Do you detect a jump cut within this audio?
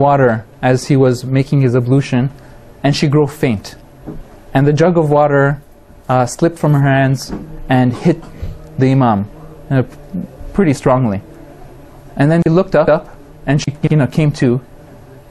no; 0 cuts

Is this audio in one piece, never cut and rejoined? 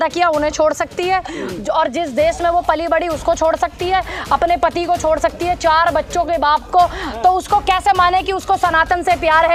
yes; 0 cuts

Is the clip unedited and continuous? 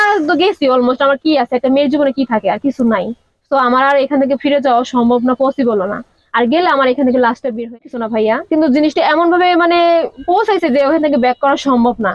no; 1 cut; at 7.8 s

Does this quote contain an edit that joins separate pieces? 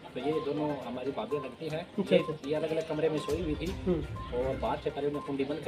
no; 0 cuts

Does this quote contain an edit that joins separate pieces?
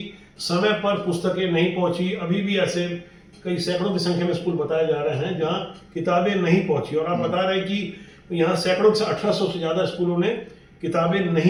no; 0 cuts

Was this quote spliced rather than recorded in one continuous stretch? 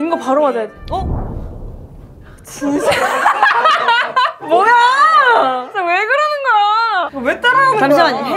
no; 0 cuts

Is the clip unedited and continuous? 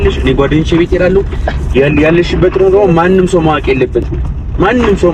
yes; 0 cuts

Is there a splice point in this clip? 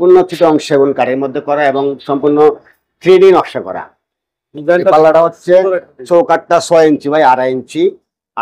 no; 0 cuts

